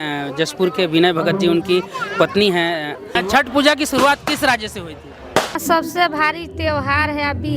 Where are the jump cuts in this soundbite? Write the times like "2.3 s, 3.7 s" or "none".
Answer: 3.2 s, 5.6 s